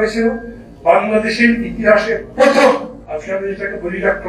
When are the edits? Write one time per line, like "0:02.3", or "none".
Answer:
0:03.0